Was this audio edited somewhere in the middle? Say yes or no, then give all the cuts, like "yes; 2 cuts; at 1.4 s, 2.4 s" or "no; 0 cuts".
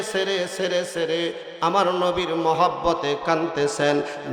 no; 0 cuts